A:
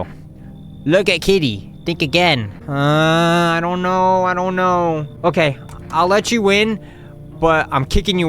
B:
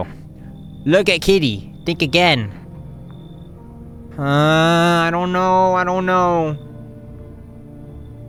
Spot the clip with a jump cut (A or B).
A